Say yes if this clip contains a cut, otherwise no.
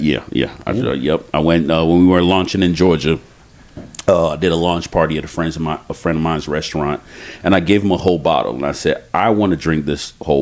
no